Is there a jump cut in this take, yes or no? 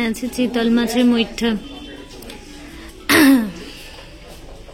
no